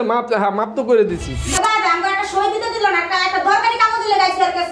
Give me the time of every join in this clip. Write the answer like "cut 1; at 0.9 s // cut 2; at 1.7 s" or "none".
cut 1; at 1.3 s